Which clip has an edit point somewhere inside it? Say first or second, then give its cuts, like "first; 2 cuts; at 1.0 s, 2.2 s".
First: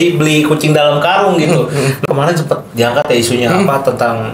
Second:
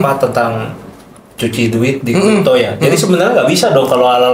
first; 1 cut; at 2.0 s